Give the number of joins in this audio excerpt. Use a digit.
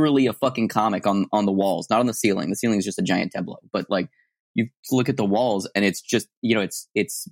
0